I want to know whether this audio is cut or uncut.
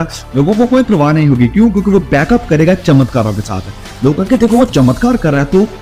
uncut